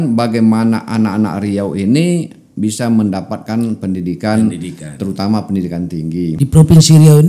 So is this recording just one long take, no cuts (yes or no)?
no